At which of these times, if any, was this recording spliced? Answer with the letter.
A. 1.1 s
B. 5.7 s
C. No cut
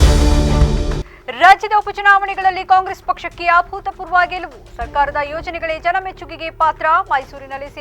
A